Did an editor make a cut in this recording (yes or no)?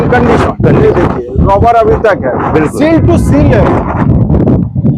no